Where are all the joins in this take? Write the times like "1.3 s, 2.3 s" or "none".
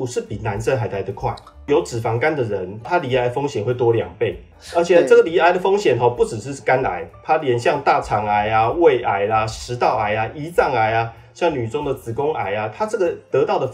1.7 s, 2.9 s